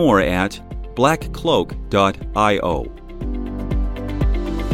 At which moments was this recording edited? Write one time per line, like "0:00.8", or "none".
0:03.0